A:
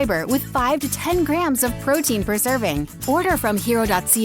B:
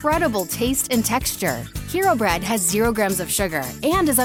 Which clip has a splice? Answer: A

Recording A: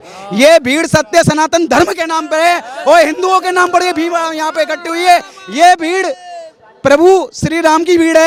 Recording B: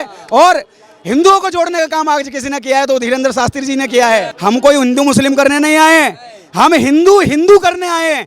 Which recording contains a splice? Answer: B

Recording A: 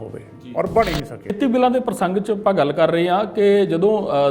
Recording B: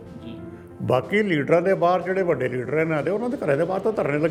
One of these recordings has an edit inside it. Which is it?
A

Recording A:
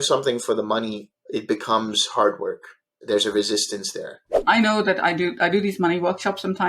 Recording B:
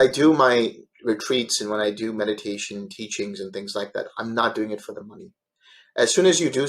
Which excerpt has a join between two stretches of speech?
A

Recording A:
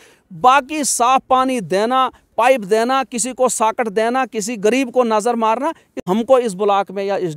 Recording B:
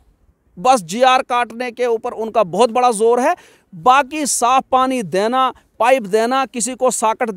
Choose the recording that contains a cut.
A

